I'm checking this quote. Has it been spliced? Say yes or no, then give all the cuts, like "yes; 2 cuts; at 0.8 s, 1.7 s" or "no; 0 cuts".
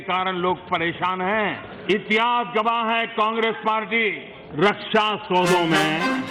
yes; 1 cut; at 1.7 s